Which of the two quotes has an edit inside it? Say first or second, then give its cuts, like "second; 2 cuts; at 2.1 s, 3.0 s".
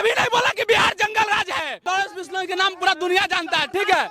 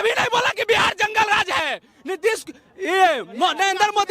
first; 1 cut; at 1.8 s